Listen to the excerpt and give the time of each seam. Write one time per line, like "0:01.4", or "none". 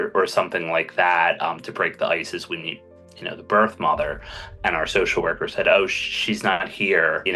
none